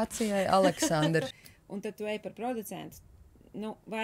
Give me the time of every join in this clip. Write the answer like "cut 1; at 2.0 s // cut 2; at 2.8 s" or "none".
cut 1; at 1.4 s